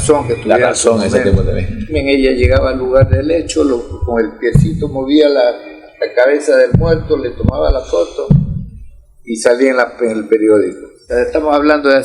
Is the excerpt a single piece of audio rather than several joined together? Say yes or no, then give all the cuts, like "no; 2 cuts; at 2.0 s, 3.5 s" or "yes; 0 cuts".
no; 2 cuts; at 1.9 s, 11.0 s